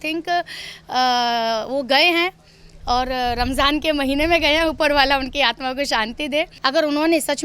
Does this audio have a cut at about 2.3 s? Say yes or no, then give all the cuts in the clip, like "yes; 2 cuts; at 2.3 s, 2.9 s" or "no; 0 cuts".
no; 1 cut; at 6.5 s